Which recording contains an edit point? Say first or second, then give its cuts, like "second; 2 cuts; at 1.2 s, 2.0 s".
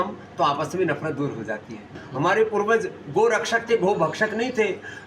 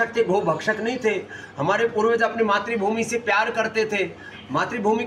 first; 1 cut; at 2.0 s